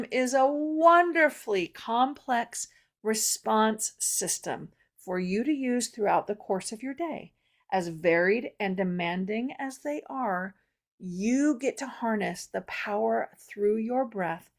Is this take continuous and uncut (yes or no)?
yes